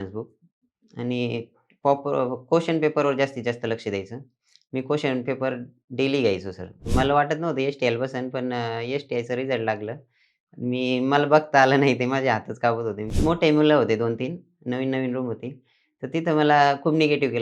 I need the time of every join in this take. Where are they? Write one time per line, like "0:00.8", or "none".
0:06.8
0:13.1